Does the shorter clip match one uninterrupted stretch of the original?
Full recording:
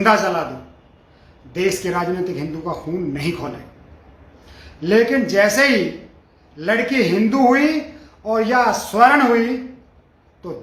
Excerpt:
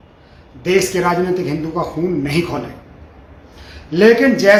yes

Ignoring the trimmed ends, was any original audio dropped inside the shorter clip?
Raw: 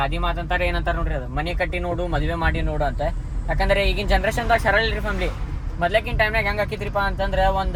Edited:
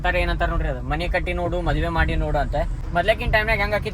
yes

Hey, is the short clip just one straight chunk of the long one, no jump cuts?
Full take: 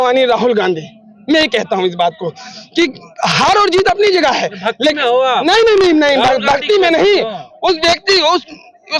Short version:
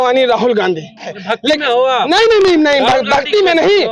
no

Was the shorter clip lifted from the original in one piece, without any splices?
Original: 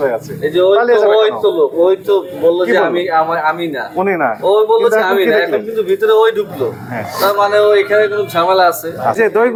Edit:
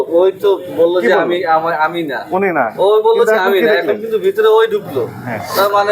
yes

